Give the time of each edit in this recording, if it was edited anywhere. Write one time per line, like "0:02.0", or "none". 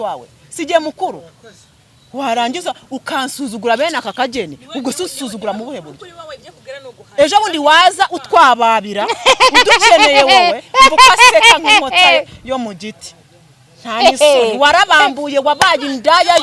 none